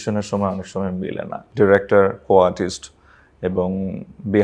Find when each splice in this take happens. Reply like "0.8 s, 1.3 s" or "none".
1.4 s